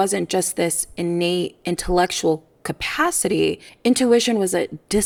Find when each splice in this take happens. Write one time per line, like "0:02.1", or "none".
none